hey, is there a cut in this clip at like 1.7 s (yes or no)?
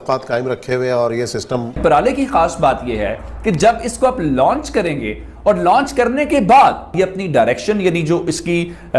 yes